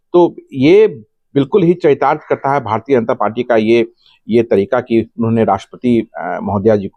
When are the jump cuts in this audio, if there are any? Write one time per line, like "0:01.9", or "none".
none